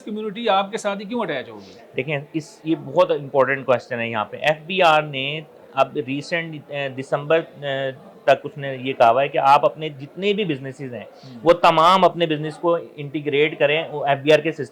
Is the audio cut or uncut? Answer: uncut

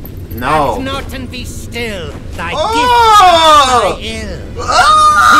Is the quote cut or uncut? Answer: uncut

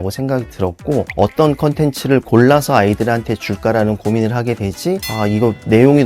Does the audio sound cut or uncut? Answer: cut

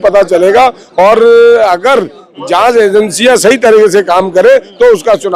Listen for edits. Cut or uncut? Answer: uncut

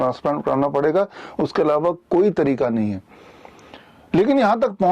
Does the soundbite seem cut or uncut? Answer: uncut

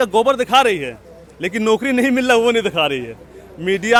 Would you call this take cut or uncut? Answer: uncut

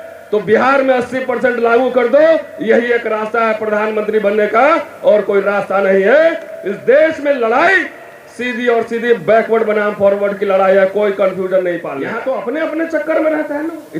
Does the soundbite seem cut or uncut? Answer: cut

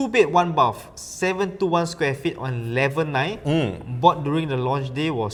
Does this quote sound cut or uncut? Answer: uncut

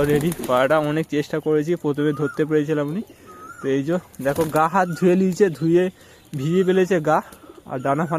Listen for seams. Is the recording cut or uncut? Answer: uncut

